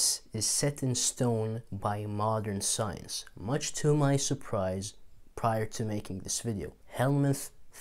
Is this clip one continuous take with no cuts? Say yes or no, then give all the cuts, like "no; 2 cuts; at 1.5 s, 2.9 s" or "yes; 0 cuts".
no; 1 cut; at 6.8 s